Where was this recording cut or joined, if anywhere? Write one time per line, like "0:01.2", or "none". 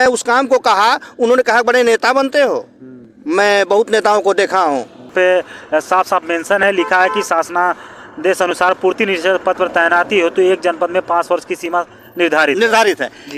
0:05.1